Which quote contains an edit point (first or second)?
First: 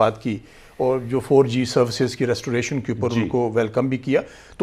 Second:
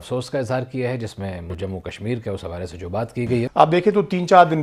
second